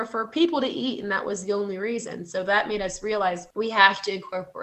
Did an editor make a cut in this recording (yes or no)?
yes